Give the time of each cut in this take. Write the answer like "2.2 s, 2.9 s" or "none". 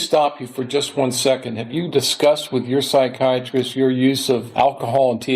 4.5 s